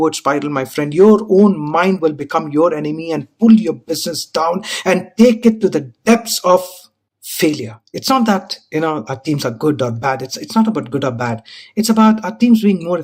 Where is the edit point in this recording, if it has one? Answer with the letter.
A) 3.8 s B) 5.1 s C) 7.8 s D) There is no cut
C